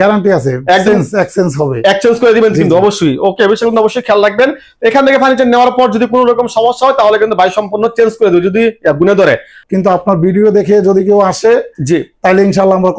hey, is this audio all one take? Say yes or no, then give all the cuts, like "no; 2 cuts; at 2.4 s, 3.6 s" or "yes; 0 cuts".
no; 1 cut; at 9.6 s